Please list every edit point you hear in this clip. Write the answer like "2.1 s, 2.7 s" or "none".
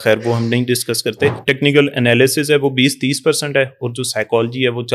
1.4 s

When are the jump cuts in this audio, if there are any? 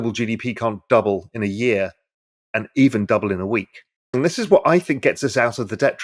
4.1 s

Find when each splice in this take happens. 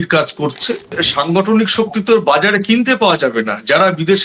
1.0 s

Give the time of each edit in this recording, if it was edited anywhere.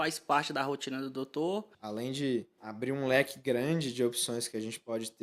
1.8 s, 2.6 s

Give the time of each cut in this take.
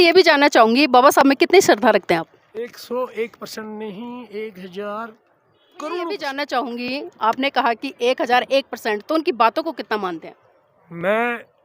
6.3 s

